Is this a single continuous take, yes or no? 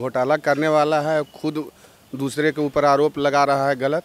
yes